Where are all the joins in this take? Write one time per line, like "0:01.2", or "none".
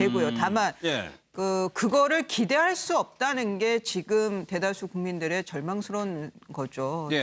0:02.5